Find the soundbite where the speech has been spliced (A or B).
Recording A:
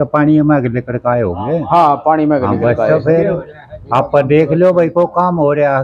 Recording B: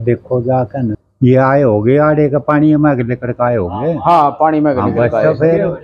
B